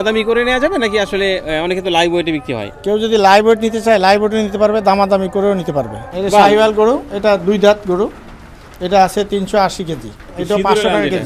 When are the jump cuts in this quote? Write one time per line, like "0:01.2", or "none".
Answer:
0:06.1
0:10.3